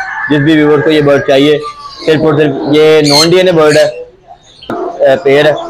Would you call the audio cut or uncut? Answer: cut